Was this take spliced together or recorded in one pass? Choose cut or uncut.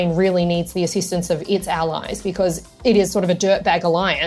uncut